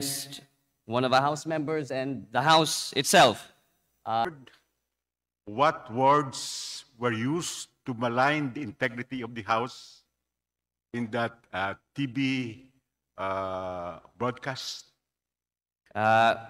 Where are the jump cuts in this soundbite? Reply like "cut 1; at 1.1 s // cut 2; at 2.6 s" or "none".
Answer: cut 1; at 4.2 s